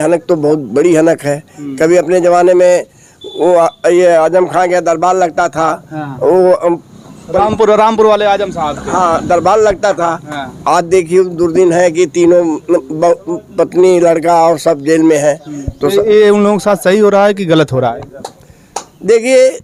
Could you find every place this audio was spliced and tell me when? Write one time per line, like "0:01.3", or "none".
none